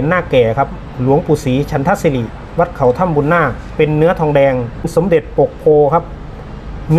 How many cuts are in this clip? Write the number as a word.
one